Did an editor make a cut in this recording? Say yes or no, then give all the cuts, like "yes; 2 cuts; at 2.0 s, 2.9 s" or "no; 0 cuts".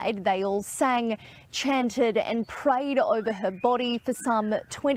no; 0 cuts